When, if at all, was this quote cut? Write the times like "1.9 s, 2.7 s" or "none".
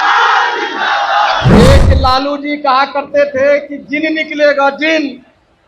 1.6 s